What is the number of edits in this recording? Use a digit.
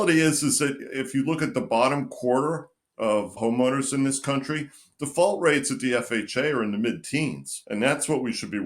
2